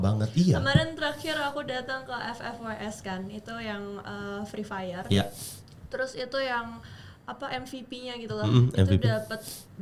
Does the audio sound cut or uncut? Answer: uncut